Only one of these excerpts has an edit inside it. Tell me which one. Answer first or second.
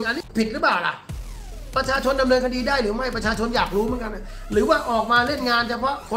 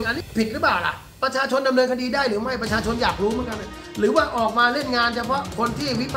second